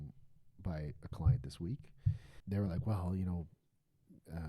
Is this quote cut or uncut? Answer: cut